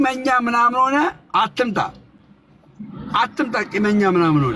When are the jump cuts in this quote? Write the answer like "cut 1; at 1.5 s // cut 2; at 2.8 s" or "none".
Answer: none